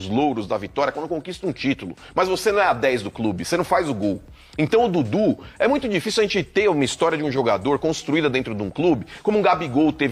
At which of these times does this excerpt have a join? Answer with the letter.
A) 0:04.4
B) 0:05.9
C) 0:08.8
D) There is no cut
D